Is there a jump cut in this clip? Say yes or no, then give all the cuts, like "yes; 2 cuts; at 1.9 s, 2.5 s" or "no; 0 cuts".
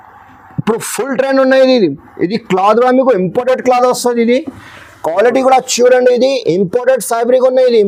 no; 0 cuts